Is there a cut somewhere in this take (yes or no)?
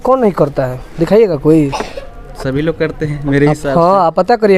no